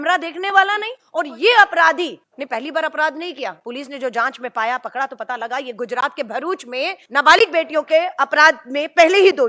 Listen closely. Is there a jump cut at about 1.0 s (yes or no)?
yes